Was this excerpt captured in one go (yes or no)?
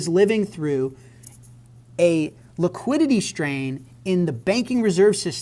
yes